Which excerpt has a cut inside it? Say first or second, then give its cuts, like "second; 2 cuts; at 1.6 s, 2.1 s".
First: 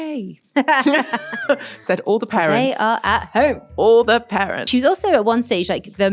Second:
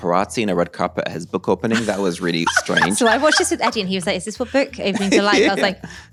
first; 1 cut; at 4.7 s